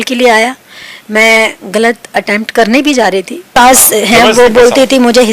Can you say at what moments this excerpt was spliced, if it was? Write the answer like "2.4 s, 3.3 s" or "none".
3.5 s